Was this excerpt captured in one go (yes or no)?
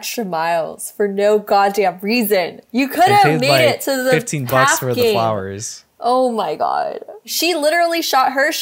no